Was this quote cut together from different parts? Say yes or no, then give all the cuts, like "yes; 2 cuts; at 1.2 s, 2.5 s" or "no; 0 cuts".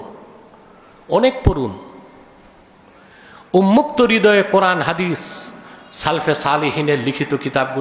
no; 0 cuts